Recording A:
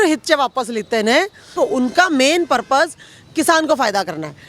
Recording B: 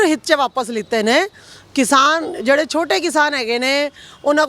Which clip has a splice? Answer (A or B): A